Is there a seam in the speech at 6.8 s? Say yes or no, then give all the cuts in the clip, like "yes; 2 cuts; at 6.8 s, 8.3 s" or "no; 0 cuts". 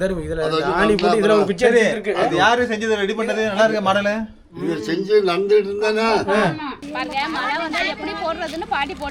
yes; 1 cut; at 6.8 s